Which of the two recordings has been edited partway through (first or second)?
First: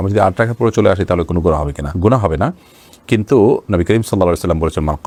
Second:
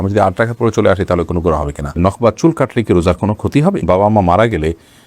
second